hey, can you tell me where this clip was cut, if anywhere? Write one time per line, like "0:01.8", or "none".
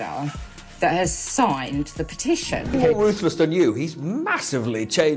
0:02.7